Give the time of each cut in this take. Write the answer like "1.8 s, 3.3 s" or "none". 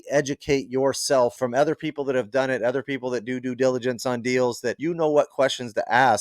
1.3 s, 4.8 s